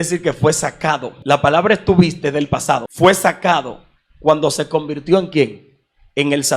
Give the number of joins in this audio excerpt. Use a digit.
2